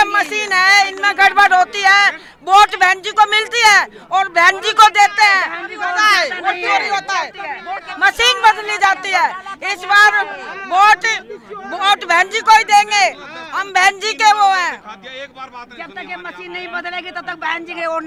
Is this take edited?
no; 0 cuts

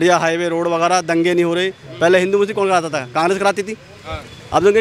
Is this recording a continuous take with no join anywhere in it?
yes; 0 cuts

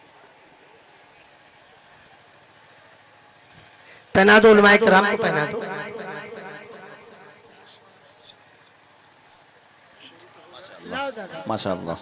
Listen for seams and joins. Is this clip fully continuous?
yes; 0 cuts

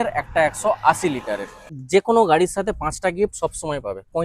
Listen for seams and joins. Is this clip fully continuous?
no; 1 cut; at 1.7 s

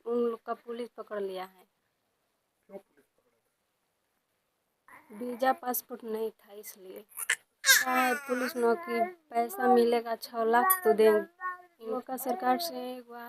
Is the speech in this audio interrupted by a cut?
yes; 2 cuts; at 7.9 s, 12.0 s

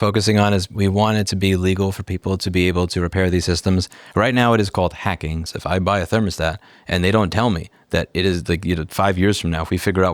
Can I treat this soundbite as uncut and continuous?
no; 1 cut; at 5.4 s

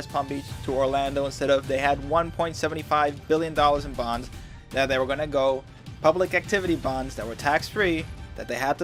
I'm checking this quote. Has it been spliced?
no; 0 cuts

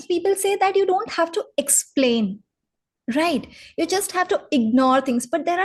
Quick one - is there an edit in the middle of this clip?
no; 0 cuts

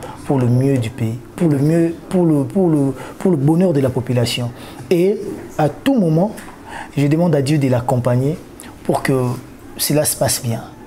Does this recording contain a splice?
no; 0 cuts

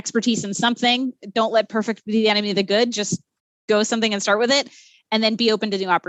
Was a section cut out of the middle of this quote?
yes; 1 cut; at 4.9 s

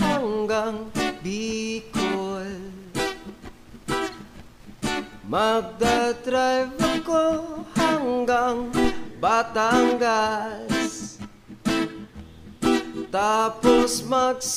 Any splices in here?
no; 0 cuts

